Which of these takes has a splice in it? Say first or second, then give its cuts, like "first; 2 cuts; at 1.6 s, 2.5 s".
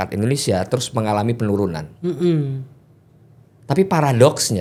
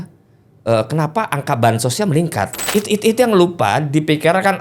second; 1 cut; at 2.6 s